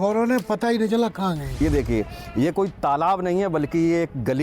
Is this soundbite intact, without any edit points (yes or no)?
no